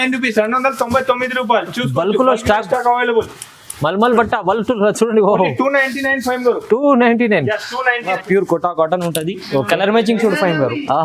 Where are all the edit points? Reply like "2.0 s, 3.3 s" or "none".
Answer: 8.2 s